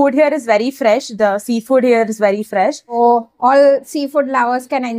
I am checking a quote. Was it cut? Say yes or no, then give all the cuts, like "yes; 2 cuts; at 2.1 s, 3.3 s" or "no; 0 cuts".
yes; 1 cut; at 3.0 s